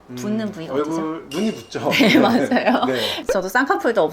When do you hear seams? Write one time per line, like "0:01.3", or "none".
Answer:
0:03.2